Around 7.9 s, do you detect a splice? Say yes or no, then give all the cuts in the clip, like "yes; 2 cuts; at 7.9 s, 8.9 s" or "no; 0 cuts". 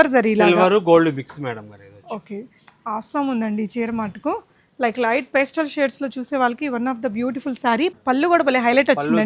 yes; 1 cut; at 7.9 s